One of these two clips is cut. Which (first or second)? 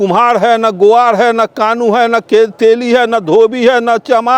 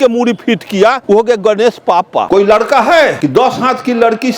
second